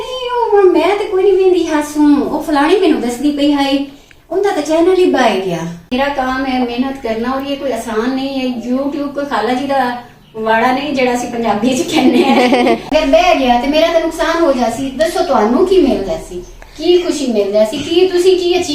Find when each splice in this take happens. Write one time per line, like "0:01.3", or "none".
0:05.9
0:12.8